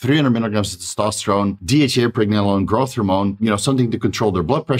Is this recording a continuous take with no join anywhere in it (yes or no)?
no